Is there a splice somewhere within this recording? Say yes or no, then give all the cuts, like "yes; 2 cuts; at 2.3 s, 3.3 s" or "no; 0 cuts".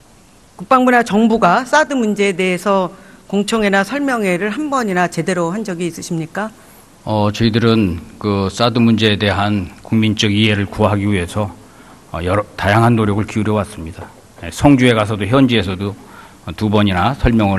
no; 0 cuts